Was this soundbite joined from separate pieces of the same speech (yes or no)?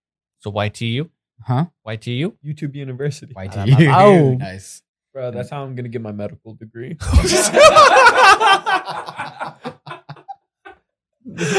yes